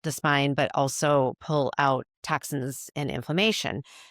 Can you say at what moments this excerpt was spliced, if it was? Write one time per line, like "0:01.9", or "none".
0:02.1